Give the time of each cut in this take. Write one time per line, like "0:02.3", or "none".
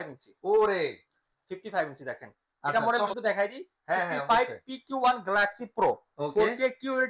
0:02.7